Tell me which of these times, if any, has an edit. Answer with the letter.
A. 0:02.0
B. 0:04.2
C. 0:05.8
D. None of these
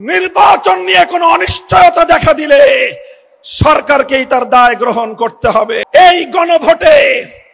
C